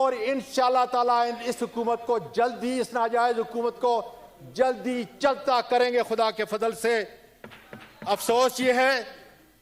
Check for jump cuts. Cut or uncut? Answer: uncut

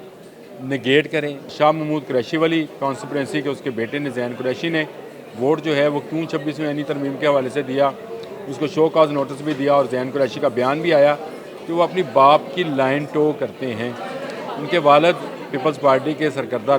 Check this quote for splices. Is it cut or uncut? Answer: cut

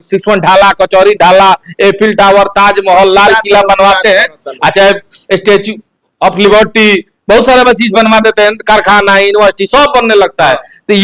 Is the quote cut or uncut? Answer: uncut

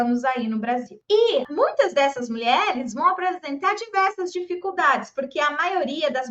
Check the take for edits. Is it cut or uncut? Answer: cut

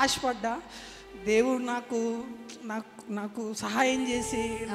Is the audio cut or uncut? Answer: uncut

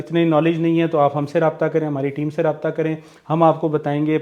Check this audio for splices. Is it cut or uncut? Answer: uncut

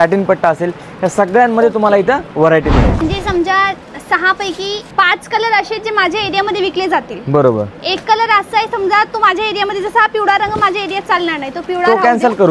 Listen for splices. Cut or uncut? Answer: cut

